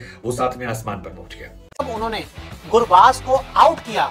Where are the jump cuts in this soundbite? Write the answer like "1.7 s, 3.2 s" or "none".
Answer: 1.8 s